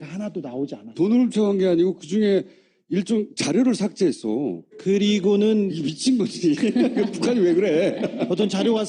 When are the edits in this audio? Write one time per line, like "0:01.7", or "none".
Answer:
0:03.5